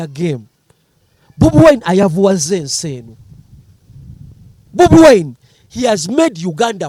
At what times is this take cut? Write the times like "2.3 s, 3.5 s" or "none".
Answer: none